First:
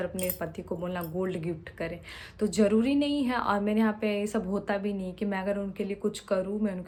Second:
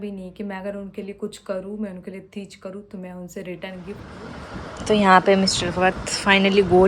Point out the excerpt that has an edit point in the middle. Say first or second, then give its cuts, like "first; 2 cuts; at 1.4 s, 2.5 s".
second; 1 cut; at 4.1 s